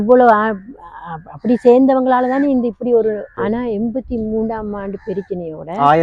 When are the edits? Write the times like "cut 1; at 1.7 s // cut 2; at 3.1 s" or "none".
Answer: cut 1; at 3.3 s

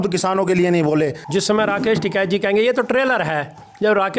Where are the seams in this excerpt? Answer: cut 1; at 1.2 s

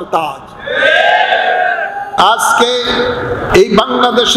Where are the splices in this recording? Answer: cut 1; at 2.1 s // cut 2; at 3.5 s

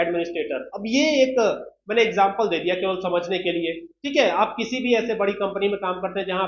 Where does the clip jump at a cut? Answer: none

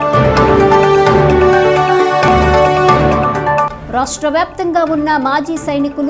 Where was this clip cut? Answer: cut 1; at 0.9 s

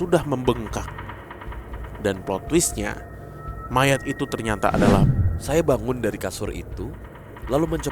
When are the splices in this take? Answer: cut 1; at 5.1 s

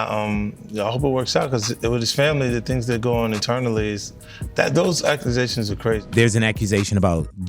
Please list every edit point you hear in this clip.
cut 1; at 6.0 s

